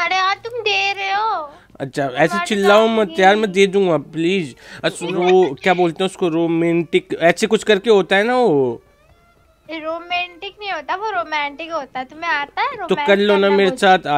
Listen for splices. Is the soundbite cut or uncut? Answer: cut